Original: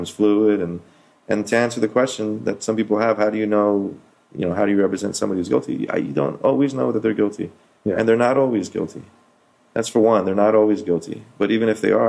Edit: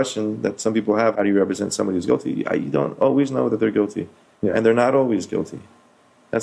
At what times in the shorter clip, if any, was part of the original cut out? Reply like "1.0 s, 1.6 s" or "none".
1.1 s